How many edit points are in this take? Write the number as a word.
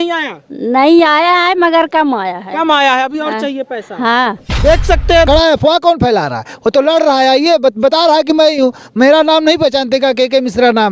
one